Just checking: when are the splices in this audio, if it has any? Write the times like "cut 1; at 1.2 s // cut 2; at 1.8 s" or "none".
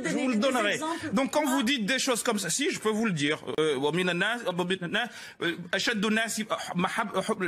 none

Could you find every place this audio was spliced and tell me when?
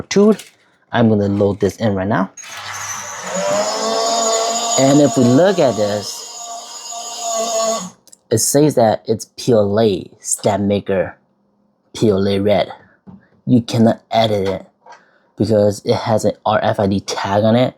cut 1; at 2.4 s

